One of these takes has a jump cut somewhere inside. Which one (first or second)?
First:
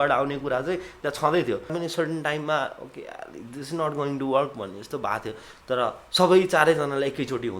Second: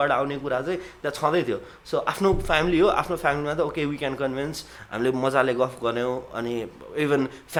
first